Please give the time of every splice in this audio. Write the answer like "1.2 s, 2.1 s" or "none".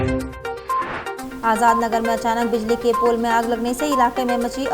1.2 s